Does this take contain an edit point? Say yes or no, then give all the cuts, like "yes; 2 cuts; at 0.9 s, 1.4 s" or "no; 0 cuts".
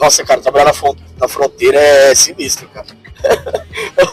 no; 0 cuts